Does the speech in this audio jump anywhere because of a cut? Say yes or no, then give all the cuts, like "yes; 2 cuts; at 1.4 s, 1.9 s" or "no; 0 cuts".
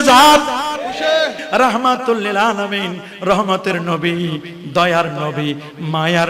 yes; 1 cut; at 1.4 s